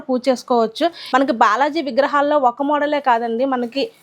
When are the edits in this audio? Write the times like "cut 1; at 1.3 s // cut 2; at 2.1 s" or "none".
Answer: cut 1; at 1.0 s

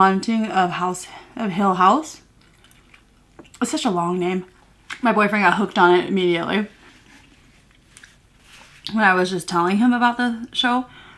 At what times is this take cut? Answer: cut 1; at 4.5 s

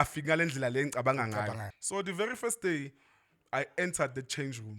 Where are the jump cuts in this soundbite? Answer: cut 1; at 1.6 s

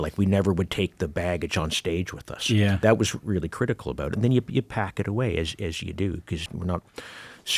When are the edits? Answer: cut 1; at 2.8 s // cut 2; at 6.5 s

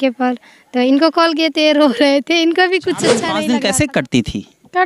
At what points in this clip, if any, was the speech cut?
cut 1; at 3.3 s

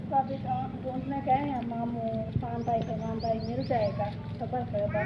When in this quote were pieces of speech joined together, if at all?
cut 1; at 2.3 s

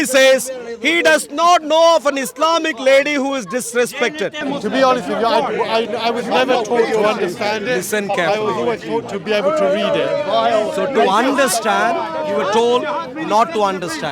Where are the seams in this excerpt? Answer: cut 1; at 4.4 s

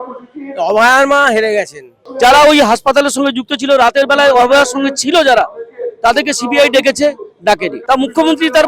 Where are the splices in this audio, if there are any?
cut 1; at 1.7 s // cut 2; at 7.7 s

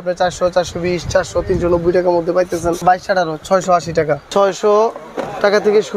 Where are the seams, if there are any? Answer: cut 1; at 2.8 s // cut 2; at 4.2 s

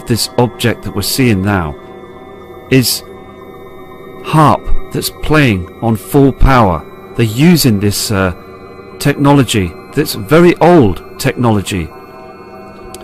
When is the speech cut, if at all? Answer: cut 1; at 11.2 s

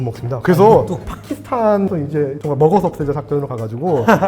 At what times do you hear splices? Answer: cut 1; at 1.0 s

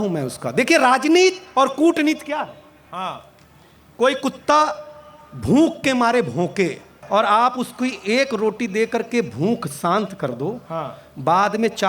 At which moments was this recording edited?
cut 1; at 7.0 s

